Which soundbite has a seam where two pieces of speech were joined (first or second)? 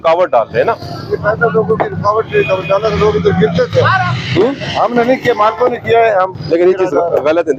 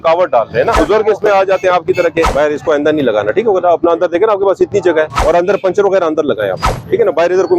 second